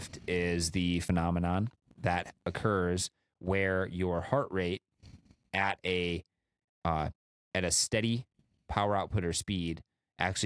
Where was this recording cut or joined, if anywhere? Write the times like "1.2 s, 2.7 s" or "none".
1.0 s